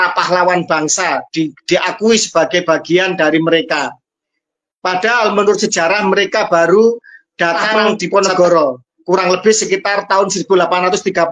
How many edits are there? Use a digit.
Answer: 1